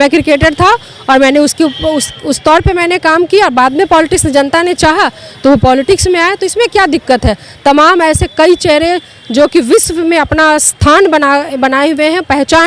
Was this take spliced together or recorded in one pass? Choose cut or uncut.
uncut